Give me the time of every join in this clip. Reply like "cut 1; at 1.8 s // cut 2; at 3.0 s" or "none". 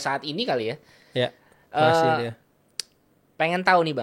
none